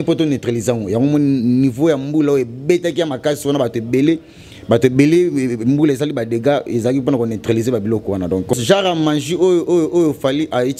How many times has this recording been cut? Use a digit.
1